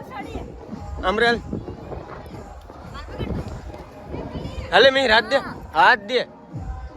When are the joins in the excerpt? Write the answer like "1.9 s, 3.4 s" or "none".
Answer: none